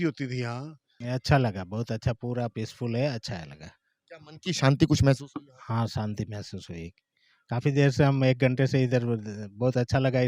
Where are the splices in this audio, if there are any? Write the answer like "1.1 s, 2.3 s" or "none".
0.9 s